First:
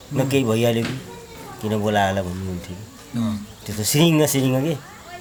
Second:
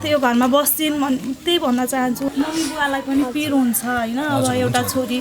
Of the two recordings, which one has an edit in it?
second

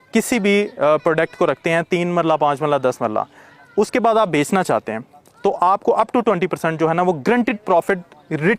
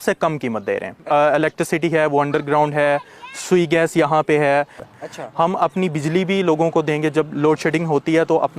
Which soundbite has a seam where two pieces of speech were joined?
second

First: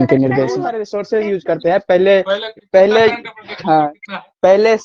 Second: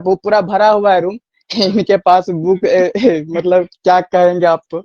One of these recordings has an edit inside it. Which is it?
first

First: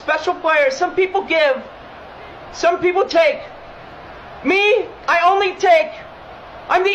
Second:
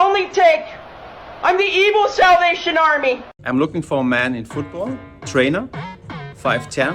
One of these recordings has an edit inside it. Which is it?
second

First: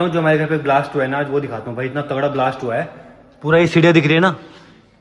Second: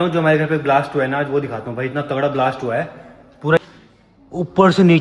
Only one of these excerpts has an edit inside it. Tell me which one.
second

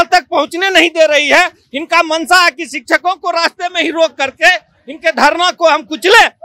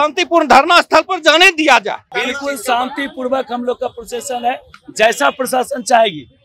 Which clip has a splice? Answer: second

